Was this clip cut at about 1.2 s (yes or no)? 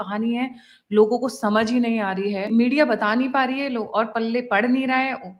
no